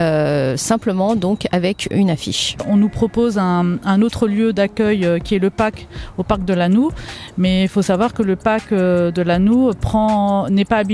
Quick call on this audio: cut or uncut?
cut